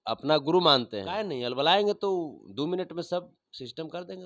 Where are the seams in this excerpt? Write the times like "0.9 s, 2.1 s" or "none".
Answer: 1.4 s

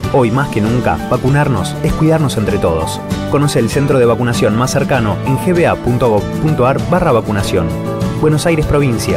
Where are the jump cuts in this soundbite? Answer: none

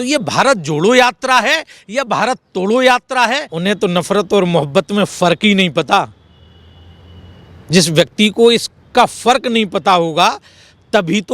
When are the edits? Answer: 3.5 s

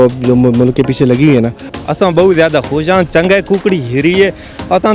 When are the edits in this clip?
1.7 s

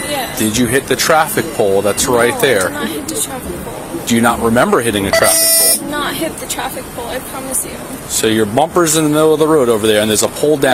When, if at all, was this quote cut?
none

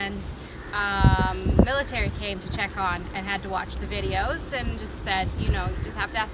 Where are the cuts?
none

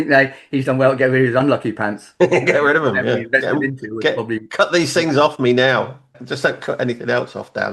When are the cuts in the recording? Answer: 6.2 s

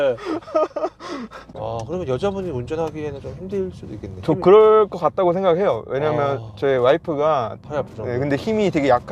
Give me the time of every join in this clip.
1.5 s, 7.6 s

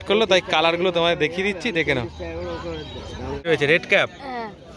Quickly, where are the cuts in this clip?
3.4 s

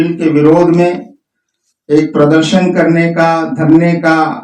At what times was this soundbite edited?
none

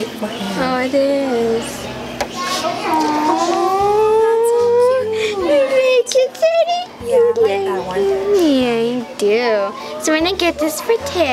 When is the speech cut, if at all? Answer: none

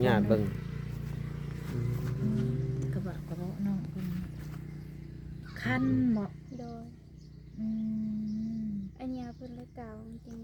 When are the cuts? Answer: none

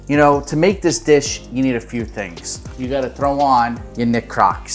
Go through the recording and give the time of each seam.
2.7 s, 3.8 s

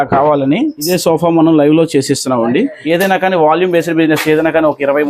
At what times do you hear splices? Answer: 0.9 s, 2.8 s

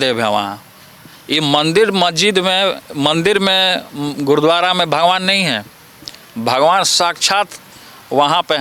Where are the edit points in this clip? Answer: none

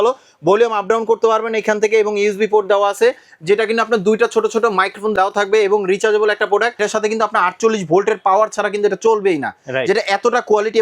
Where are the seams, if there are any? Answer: 5.1 s, 6.8 s

